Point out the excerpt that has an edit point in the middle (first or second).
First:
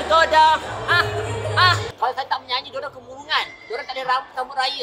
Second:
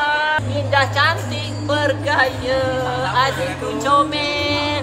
first